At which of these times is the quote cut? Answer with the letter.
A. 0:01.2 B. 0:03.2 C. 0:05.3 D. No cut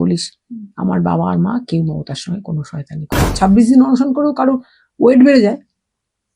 B